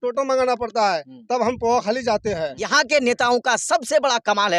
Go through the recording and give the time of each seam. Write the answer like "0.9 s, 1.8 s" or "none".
2.6 s